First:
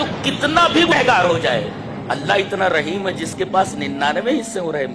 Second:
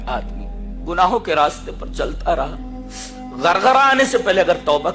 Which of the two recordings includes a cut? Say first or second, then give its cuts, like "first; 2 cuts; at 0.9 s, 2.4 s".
first; 1 cut; at 0.9 s